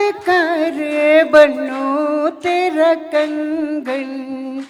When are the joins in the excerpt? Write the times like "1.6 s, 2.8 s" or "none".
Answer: none